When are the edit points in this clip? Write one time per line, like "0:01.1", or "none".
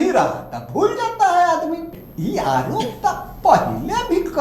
0:01.9